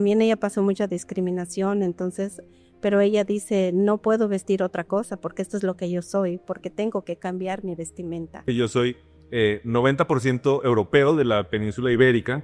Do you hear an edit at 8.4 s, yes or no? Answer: yes